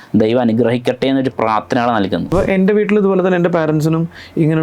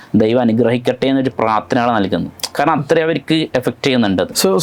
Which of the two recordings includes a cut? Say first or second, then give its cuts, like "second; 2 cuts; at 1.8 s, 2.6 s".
first; 1 cut; at 2.3 s